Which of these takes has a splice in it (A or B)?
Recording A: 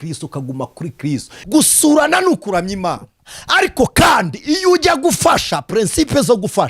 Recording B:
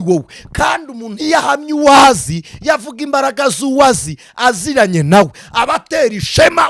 A